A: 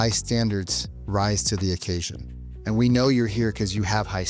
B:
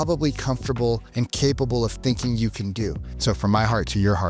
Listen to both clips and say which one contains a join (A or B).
B